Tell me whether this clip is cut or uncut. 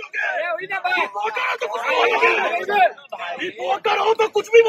uncut